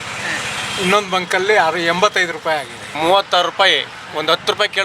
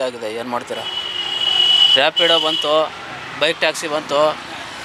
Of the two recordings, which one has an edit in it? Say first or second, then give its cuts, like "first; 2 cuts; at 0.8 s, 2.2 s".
first; 1 cut; at 3.0 s